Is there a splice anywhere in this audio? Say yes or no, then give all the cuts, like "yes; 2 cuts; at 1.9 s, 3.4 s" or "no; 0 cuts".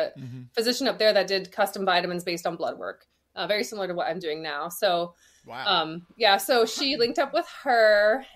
no; 0 cuts